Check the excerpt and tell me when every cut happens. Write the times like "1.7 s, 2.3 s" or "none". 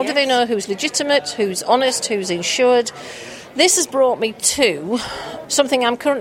5.2 s